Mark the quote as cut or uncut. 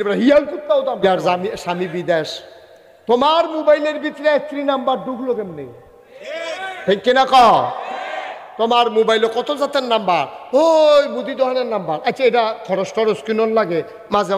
cut